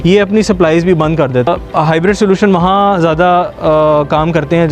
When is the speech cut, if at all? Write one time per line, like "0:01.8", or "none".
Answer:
0:01.5